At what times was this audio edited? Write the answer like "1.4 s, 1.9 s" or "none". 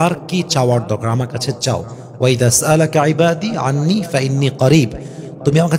none